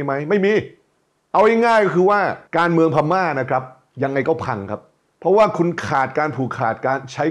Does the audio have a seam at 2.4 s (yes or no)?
yes